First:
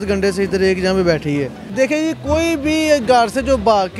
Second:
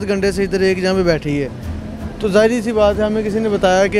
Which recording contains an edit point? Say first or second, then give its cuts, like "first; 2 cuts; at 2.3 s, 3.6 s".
first; 1 cut; at 1.6 s